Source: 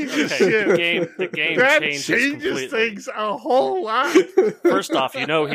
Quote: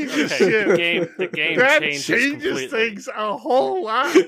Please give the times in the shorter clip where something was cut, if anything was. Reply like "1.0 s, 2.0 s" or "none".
none